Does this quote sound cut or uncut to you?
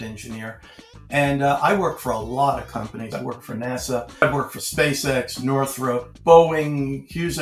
cut